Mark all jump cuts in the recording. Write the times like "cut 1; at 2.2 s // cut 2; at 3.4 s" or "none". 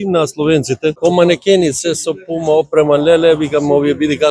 cut 1; at 1.0 s